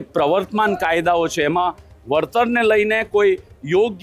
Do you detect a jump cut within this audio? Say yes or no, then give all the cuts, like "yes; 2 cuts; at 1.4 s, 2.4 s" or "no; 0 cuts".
no; 0 cuts